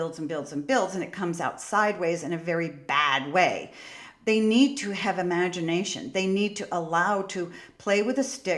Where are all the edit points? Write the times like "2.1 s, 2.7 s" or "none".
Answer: 4.1 s